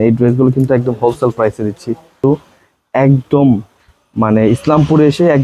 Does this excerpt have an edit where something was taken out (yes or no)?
yes